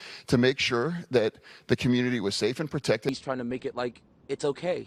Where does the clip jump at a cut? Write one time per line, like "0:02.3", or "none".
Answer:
0:03.1